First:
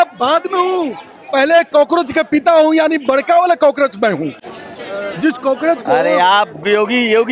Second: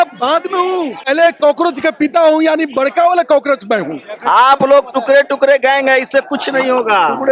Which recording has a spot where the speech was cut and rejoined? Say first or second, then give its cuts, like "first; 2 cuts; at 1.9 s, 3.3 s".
second; 2 cuts; at 1.1 s, 4.1 s